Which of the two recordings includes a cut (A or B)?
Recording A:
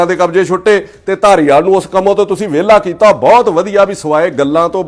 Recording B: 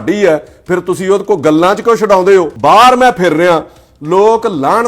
B